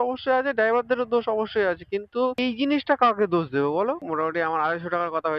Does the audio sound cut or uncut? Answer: cut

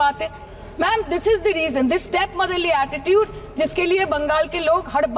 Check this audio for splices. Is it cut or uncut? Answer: uncut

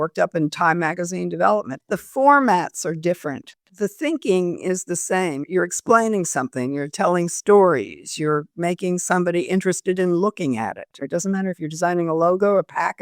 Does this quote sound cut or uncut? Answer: cut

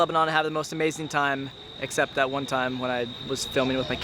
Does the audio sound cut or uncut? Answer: uncut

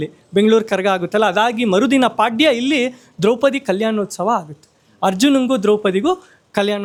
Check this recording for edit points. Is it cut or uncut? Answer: uncut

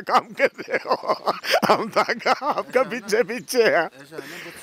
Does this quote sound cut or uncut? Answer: uncut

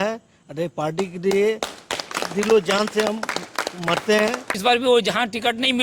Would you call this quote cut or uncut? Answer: cut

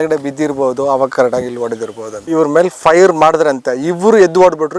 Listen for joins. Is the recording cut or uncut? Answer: cut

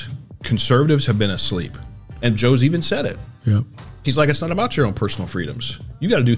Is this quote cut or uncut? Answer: cut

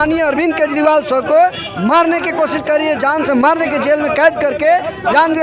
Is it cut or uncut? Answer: uncut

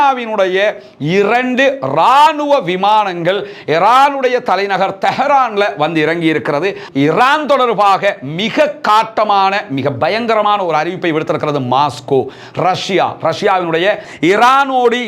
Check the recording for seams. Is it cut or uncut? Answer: cut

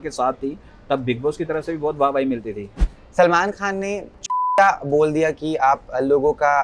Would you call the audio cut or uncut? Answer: cut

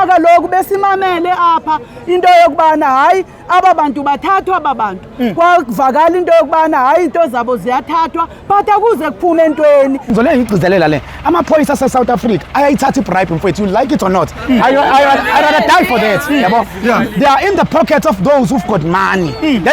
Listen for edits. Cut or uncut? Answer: cut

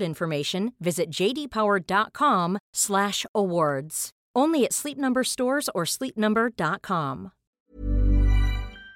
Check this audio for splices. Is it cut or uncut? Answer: cut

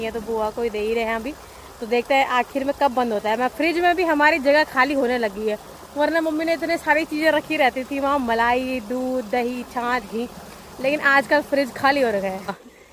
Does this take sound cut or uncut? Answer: uncut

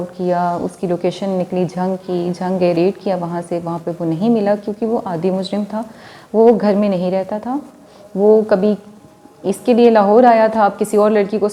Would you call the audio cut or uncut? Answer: uncut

